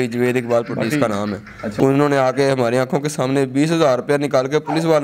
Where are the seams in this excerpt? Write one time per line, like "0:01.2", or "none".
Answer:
0:01.6